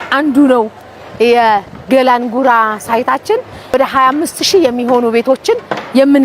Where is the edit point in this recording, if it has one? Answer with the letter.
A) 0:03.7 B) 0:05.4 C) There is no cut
A